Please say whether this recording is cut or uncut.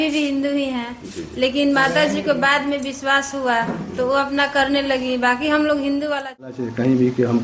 cut